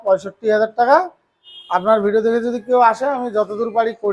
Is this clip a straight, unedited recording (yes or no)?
yes